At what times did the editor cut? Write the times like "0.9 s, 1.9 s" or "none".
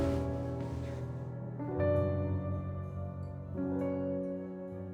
none